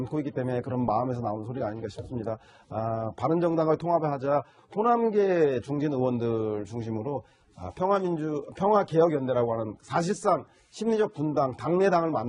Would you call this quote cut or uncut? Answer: uncut